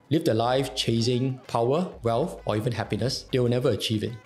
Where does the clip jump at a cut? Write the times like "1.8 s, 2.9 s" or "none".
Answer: none